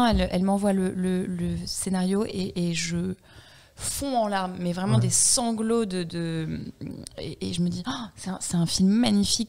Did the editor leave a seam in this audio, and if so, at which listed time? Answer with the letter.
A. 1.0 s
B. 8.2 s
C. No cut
C